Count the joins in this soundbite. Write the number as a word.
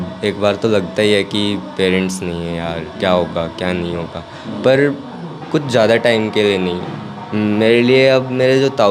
zero